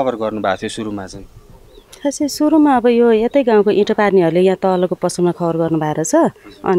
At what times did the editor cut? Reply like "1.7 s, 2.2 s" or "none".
none